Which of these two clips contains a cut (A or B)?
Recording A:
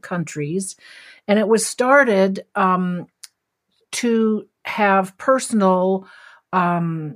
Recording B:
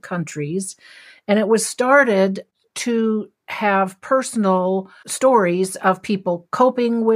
B